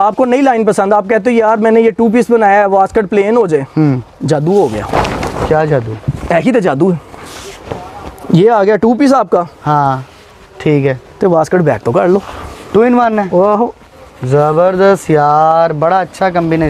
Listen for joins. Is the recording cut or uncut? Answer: uncut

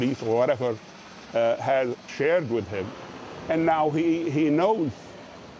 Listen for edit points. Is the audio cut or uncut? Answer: cut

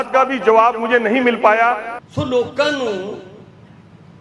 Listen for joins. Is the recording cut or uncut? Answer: cut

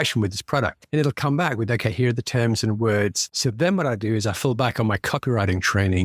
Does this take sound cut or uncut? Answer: cut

